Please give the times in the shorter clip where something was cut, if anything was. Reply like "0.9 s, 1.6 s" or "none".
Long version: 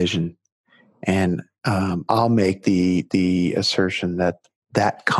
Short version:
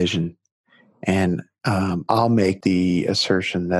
2.6 s